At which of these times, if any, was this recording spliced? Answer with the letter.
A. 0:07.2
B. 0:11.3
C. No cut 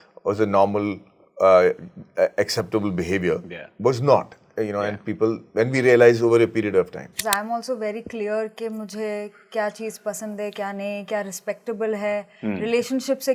A